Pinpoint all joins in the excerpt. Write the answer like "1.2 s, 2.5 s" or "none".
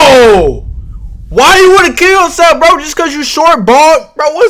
none